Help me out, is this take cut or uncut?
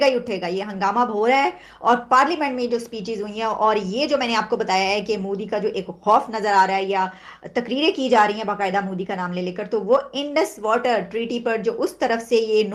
uncut